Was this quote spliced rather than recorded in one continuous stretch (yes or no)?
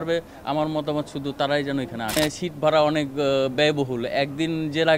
yes